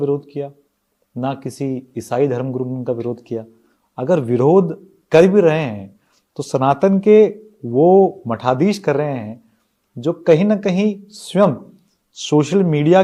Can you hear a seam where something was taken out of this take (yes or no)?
no